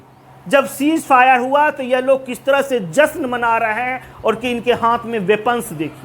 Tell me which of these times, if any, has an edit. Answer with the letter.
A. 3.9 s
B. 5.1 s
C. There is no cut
A